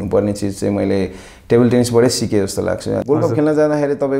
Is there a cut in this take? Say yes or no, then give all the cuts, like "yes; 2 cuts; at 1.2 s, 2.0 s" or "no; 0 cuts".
yes; 1 cut; at 3.0 s